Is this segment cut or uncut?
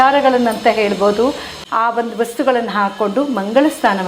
cut